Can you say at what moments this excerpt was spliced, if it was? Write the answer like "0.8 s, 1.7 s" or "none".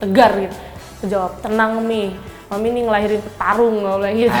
none